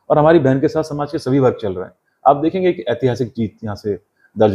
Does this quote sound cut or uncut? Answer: uncut